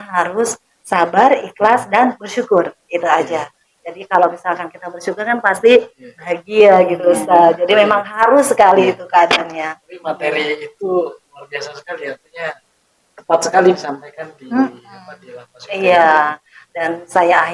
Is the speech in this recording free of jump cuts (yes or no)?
yes